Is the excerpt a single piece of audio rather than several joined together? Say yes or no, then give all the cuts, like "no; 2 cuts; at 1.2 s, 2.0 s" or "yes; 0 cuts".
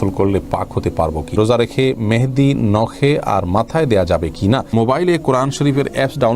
no; 2 cuts; at 1.3 s, 4.7 s